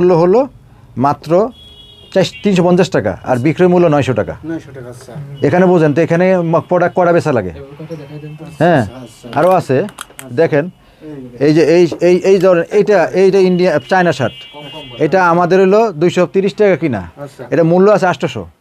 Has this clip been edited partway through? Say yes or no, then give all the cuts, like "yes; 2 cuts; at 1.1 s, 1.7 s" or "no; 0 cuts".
no; 0 cuts